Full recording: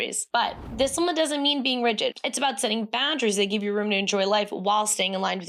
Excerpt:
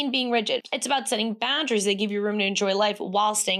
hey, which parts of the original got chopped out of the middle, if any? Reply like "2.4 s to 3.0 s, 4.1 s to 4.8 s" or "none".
none